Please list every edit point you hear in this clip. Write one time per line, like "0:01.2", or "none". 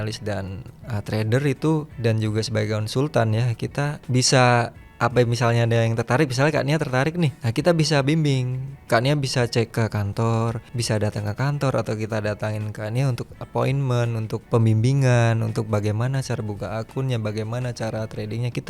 0:01.9
0:04.0
0:04.8
0:07.4
0:09.7
0:10.7
0:14.4